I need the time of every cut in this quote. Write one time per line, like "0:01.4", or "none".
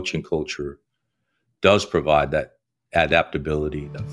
none